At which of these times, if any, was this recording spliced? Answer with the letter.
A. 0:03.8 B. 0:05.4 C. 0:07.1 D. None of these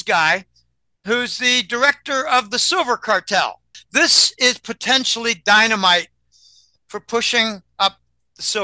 A